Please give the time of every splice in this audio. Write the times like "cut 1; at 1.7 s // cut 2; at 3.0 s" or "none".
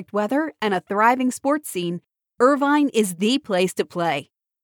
none